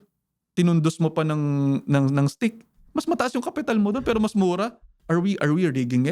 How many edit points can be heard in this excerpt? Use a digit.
1